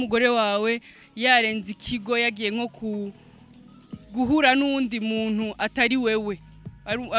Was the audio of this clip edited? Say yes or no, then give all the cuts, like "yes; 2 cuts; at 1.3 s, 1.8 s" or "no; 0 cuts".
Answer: no; 0 cuts